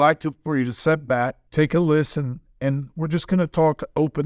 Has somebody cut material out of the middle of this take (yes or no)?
yes